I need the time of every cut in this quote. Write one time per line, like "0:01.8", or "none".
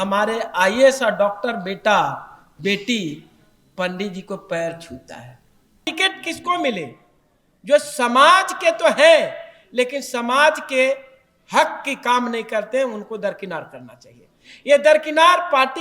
0:05.9

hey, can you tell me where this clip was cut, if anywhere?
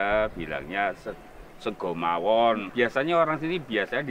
0:02.7

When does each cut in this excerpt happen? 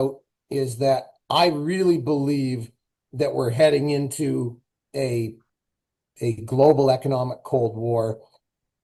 none

